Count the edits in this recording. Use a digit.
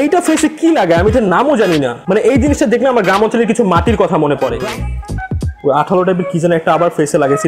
1